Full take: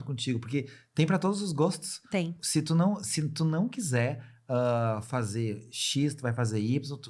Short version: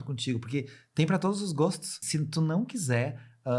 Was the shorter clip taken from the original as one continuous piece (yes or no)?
no